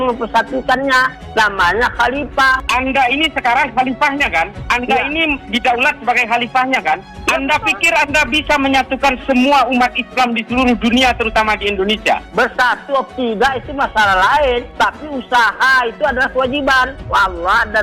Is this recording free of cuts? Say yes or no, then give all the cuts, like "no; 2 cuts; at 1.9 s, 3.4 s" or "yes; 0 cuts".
yes; 0 cuts